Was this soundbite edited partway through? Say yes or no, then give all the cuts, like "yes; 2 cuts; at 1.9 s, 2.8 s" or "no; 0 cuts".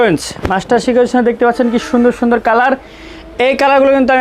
no; 0 cuts